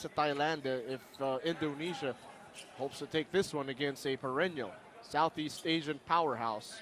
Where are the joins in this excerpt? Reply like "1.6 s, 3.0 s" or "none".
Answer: 4.3 s